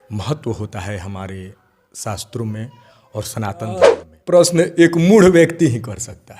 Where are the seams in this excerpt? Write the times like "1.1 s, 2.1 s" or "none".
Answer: 3.8 s